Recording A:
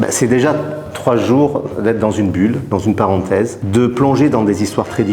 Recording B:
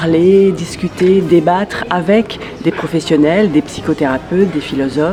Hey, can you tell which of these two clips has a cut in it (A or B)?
A